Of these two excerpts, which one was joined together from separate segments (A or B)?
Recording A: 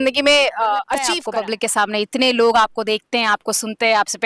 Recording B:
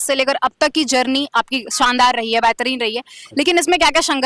A